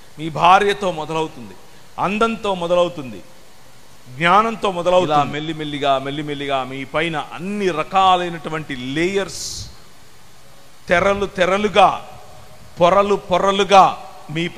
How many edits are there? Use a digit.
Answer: 1